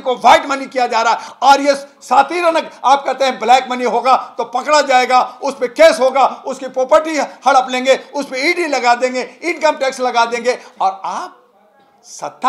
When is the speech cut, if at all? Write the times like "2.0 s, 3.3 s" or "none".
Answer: none